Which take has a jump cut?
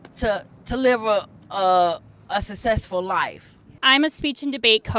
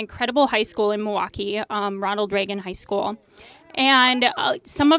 first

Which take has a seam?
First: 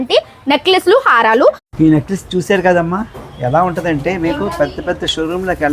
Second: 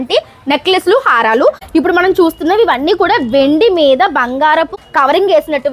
second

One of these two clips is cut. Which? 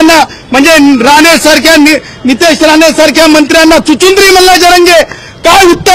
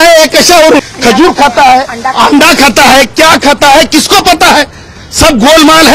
second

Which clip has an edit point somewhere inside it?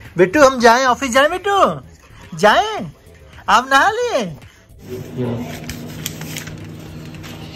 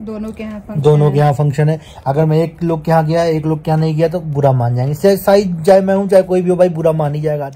first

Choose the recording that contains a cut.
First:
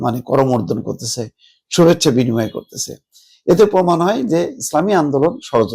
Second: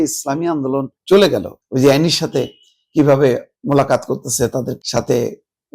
second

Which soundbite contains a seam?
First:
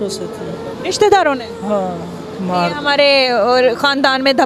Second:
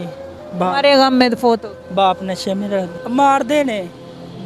second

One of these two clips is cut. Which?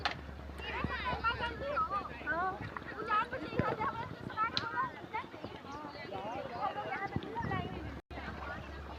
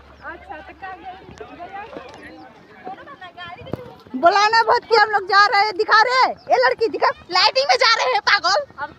second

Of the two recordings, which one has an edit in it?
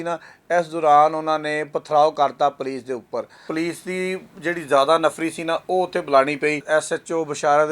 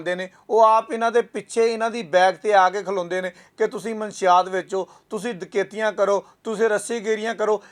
first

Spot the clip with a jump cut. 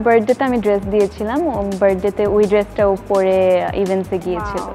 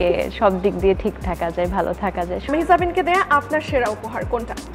second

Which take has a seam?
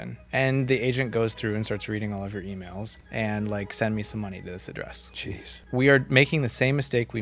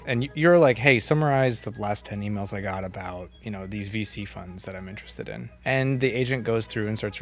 first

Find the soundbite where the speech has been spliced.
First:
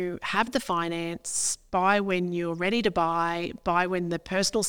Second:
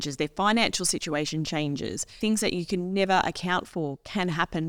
second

